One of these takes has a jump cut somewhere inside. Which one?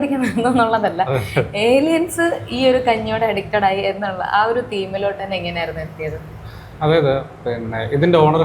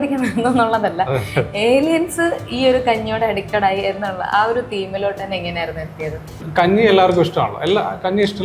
second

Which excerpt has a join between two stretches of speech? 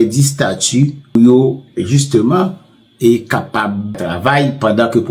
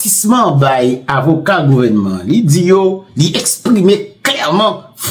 first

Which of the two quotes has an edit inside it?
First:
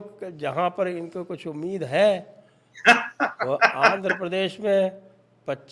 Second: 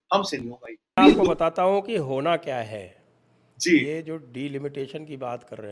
second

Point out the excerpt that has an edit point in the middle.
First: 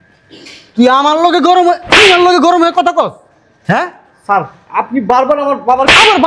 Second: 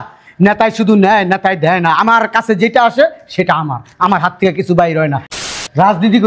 second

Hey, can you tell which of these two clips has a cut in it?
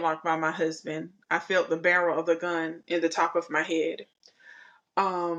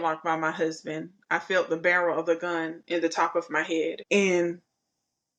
second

